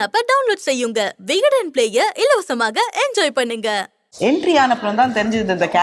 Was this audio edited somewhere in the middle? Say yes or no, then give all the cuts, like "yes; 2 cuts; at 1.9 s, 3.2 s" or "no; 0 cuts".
yes; 1 cut; at 4.0 s